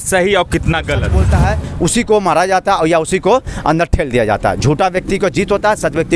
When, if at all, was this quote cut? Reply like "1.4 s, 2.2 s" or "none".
1.2 s